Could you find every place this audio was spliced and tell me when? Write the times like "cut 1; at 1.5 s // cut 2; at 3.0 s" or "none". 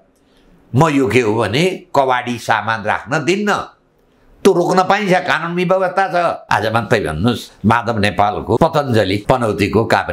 cut 1; at 6.4 s // cut 2; at 7.5 s // cut 3; at 8.6 s // cut 4; at 9.2 s